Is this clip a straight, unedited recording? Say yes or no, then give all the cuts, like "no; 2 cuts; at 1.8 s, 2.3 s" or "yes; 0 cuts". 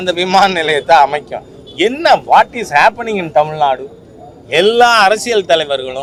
yes; 0 cuts